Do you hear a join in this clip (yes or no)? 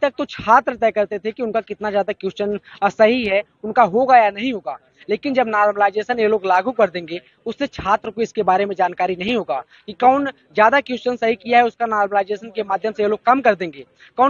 no